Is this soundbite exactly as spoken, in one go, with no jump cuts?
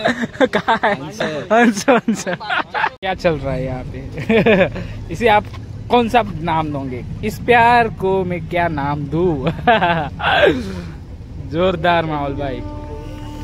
no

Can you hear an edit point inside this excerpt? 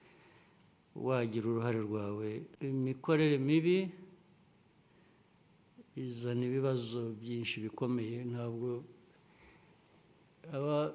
yes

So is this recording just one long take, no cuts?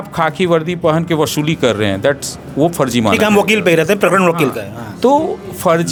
yes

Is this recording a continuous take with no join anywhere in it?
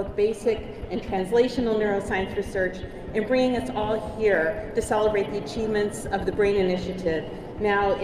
yes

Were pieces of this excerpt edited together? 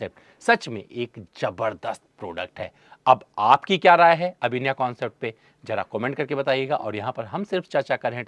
no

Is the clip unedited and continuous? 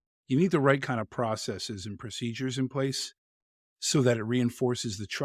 yes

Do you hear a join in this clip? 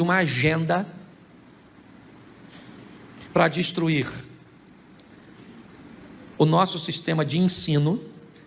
no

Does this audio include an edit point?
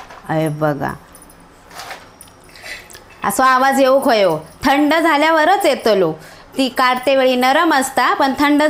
no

